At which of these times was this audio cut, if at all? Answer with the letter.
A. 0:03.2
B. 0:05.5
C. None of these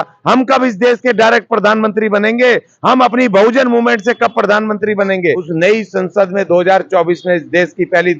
B